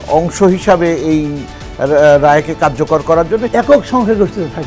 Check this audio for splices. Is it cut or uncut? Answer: cut